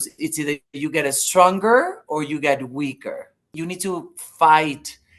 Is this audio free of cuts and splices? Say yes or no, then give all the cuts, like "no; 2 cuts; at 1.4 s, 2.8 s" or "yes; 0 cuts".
no; 1 cut; at 3.5 s